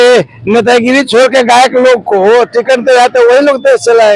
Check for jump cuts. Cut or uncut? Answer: uncut